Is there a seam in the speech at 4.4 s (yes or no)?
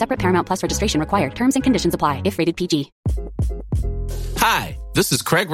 no